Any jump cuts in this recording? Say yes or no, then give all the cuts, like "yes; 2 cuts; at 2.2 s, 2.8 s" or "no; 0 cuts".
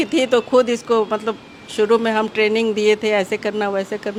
no; 0 cuts